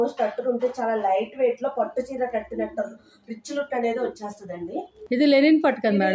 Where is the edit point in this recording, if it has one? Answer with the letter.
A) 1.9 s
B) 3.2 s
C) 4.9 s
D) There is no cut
C